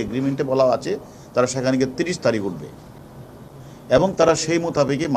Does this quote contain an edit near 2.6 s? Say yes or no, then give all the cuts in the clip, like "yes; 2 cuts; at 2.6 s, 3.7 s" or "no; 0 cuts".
no; 0 cuts